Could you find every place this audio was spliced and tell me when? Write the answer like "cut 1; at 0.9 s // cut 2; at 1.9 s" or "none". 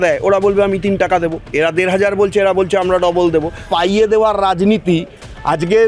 cut 1; at 3.7 s